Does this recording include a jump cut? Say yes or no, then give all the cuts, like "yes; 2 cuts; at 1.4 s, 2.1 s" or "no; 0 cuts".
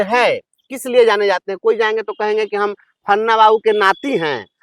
no; 0 cuts